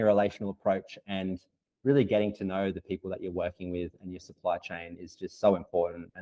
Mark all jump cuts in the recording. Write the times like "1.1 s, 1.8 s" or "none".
none